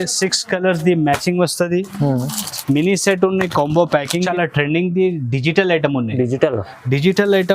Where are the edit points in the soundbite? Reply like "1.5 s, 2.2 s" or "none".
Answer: 4.2 s